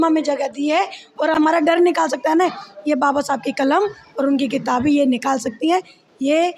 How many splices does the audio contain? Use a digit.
1